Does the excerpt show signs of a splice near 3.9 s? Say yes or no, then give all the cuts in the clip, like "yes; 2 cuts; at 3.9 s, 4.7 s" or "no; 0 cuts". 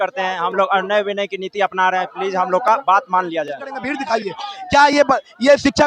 yes; 1 cut; at 3.9 s